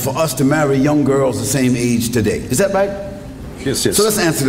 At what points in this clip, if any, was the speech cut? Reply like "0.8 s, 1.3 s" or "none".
none